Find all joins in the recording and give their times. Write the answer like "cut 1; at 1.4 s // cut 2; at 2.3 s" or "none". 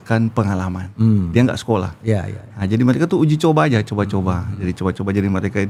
none